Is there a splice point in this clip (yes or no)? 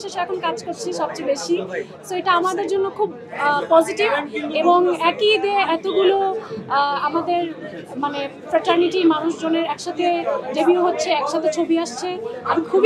no